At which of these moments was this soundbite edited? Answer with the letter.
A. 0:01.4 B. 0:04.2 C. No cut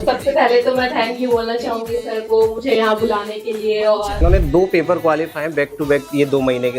B